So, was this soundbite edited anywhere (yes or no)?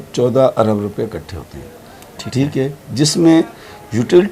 no